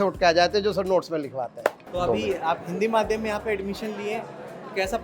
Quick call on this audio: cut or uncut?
cut